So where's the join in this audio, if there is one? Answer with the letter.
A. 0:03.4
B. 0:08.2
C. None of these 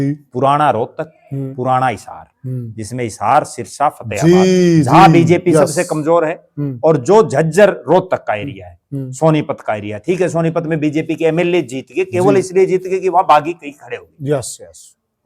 C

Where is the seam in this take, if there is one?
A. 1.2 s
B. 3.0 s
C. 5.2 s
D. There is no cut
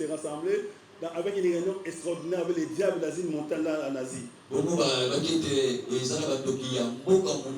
D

